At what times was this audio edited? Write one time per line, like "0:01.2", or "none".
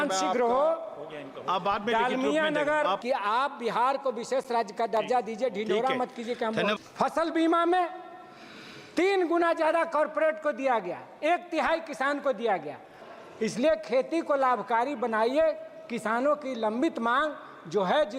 0:03.0
0:06.8
0:13.0